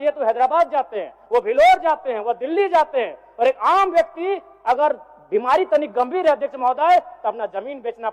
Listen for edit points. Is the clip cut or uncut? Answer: uncut